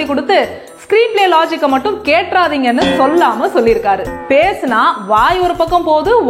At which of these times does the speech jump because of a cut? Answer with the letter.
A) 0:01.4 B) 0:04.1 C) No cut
B